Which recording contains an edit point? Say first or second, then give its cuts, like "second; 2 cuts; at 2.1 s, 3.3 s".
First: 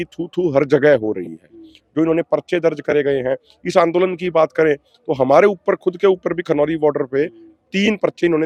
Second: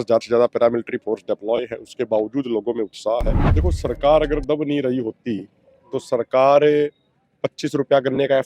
second; 1 cut; at 3.4 s